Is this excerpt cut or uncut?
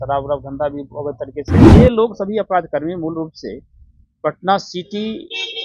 cut